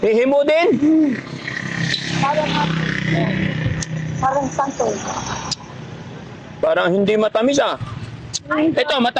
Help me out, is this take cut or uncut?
uncut